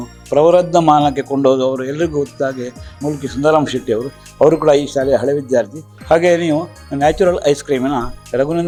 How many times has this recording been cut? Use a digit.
0